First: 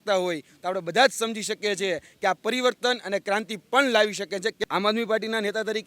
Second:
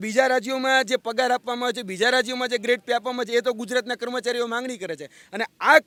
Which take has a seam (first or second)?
first